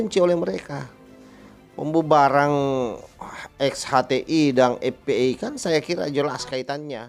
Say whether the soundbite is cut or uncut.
uncut